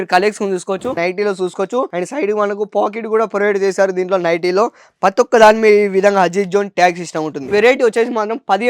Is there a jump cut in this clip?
yes; 2 cuts; at 0.9 s, 7.5 s

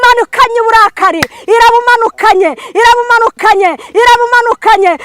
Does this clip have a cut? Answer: no; 0 cuts

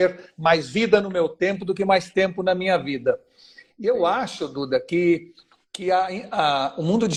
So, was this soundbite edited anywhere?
no; 0 cuts

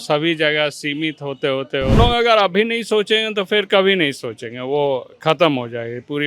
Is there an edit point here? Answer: yes; 1 cut; at 2.0 s

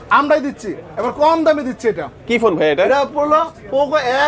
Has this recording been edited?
no; 0 cuts

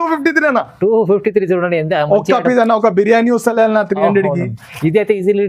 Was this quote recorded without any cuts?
yes; 0 cuts

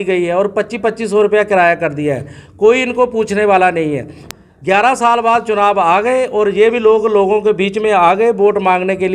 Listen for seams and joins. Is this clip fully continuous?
no; 1 cut; at 4.2 s

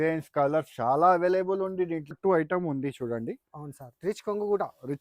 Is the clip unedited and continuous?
no; 1 cut; at 2.1 s

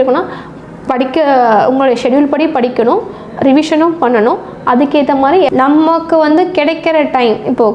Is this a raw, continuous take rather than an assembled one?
no; 1 cut; at 5.5 s

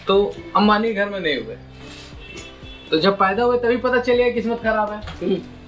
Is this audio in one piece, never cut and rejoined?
yes; 0 cuts

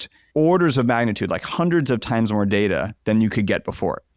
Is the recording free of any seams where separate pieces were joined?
yes; 0 cuts

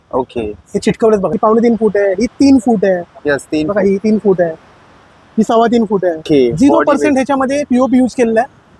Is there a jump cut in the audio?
yes; 2 cuts; at 1.3 s, 6.2 s

